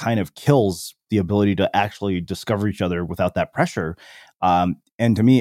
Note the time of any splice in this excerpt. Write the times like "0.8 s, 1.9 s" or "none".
none